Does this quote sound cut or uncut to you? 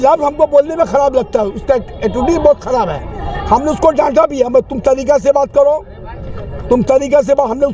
uncut